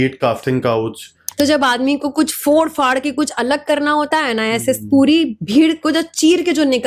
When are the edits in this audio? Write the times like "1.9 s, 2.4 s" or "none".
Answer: 1.2 s